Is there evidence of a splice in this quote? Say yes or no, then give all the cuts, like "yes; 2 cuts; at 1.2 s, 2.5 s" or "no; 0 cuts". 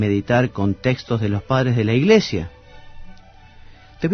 no; 0 cuts